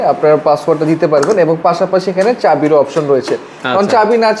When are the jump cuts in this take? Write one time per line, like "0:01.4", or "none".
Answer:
none